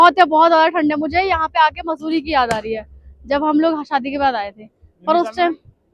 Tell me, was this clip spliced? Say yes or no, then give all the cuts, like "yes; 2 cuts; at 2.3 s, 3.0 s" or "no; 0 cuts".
no; 0 cuts